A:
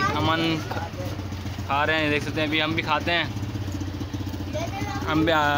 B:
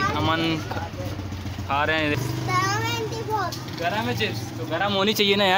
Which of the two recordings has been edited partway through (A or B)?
B